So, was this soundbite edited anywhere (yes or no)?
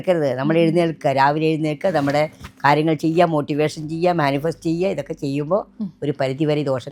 no